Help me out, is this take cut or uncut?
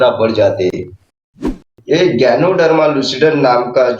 cut